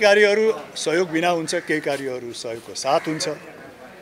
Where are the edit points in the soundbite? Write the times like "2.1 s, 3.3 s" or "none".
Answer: none